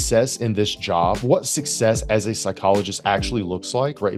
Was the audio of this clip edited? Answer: no; 0 cuts

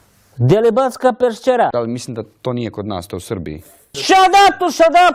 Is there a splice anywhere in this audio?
yes; 1 cut; at 2.1 s

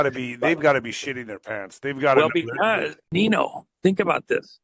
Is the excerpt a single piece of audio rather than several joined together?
no; 1 cut; at 3.0 s

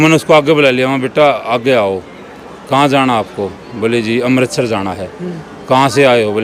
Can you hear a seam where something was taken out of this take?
no; 0 cuts

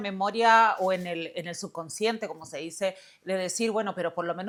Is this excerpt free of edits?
yes; 0 cuts

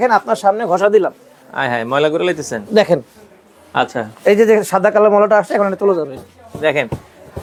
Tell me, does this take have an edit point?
no; 0 cuts

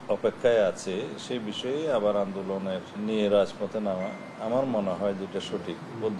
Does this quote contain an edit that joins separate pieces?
yes; 1 cut; at 2.9 s

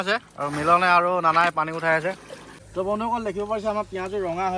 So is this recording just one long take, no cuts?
no; 1 cut; at 2.6 s

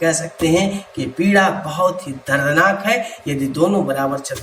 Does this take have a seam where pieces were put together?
no; 0 cuts

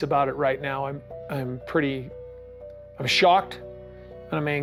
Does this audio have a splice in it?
no; 0 cuts

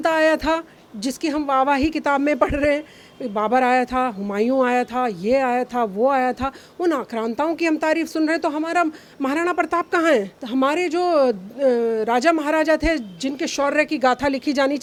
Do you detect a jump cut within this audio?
no; 0 cuts

